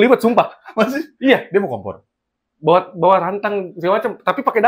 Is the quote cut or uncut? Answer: uncut